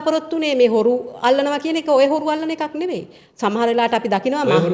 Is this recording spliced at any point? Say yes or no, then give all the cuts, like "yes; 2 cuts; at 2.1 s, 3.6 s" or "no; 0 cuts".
no; 0 cuts